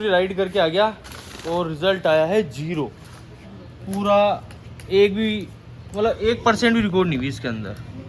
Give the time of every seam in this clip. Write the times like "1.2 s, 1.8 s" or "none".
none